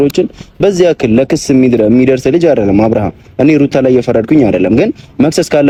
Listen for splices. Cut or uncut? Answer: uncut